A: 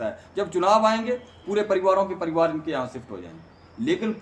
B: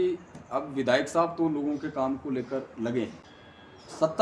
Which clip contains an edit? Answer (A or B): B